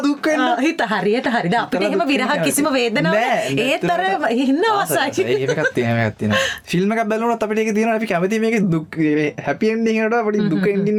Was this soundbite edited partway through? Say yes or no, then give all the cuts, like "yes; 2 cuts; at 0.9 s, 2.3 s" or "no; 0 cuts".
no; 0 cuts